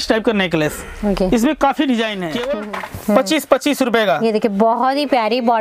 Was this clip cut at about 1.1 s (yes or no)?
no